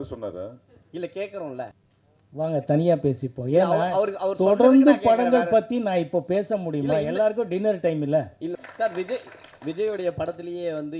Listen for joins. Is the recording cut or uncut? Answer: cut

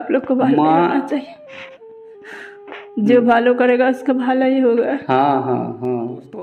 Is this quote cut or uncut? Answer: uncut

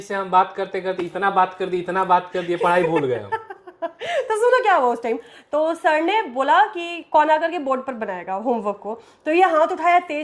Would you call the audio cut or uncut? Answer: uncut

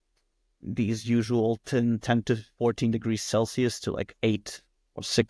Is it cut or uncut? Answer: uncut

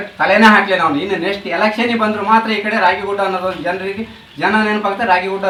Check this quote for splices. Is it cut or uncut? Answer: uncut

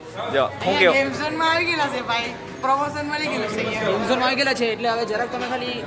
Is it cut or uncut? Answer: uncut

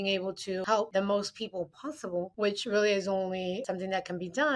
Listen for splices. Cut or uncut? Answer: cut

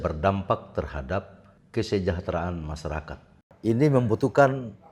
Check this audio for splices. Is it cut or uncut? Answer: uncut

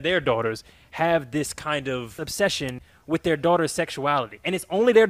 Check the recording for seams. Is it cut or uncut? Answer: cut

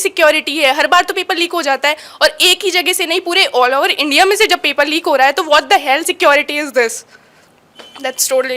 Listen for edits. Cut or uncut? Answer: uncut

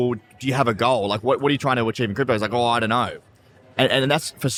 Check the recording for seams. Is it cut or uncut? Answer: uncut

